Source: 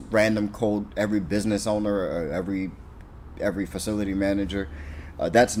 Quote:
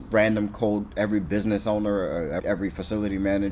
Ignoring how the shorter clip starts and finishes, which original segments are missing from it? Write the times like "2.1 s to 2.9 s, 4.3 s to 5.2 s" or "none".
2.4 s to 3.4 s